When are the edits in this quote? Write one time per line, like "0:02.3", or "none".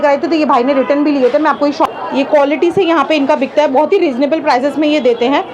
0:01.8